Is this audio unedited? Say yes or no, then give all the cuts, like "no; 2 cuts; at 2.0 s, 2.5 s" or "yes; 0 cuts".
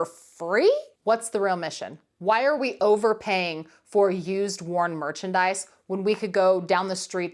no; 2 cuts; at 0.9 s, 2.1 s